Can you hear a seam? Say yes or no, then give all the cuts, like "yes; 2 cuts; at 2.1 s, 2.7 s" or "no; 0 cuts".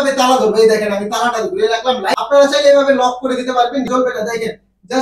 yes; 2 cuts; at 1.6 s, 3.9 s